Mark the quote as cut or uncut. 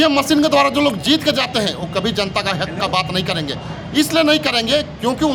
uncut